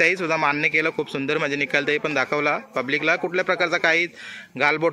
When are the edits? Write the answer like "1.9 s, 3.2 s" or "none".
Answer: none

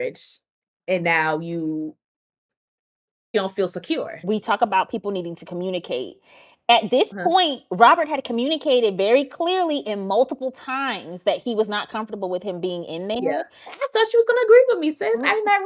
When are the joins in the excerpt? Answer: 4.2 s, 13.7 s

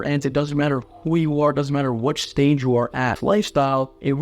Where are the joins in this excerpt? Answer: 3.2 s

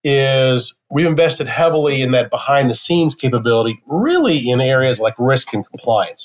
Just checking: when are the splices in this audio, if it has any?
none

